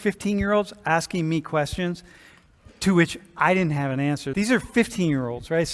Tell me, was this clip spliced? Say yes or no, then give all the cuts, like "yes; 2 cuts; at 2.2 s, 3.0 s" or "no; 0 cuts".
yes; 1 cut; at 4.3 s